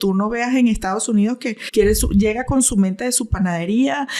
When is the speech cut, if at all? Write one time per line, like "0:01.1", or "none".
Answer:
0:01.5